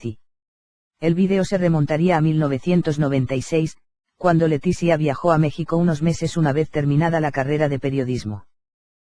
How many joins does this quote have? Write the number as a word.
zero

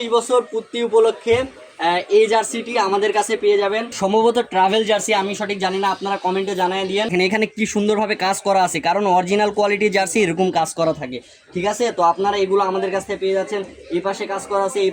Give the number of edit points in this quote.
two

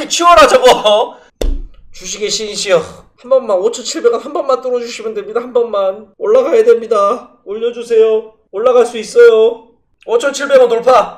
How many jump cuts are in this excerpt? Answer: three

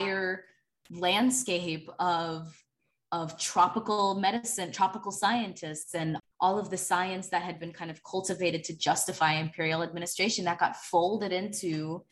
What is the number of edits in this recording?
one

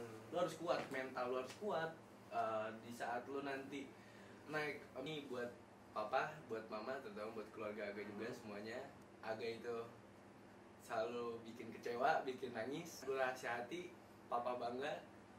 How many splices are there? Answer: three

